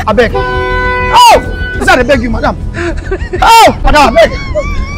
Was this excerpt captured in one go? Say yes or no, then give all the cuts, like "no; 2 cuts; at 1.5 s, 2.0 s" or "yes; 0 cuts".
no; 2 cuts; at 1.8 s, 3.8 s